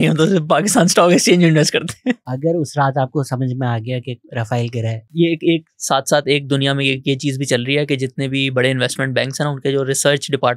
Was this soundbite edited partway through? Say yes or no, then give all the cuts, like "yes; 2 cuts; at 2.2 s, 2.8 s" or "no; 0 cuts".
yes; 2 cuts; at 2.3 s, 5.1 s